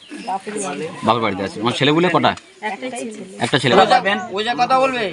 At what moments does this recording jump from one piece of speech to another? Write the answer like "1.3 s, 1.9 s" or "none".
3.7 s